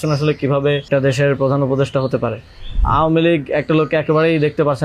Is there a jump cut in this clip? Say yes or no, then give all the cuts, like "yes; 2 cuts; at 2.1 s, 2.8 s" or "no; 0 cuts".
yes; 2 cuts; at 0.9 s, 2.8 s